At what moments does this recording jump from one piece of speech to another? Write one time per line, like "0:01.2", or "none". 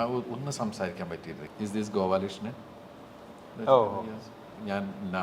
0:01.3